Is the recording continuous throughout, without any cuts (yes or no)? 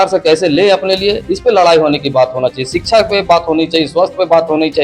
yes